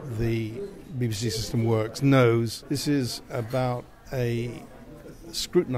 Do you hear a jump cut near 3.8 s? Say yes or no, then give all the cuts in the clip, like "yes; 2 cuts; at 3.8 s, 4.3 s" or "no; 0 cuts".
no; 1 cut; at 2.6 s